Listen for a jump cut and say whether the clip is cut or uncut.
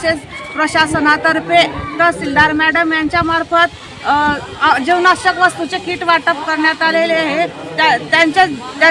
uncut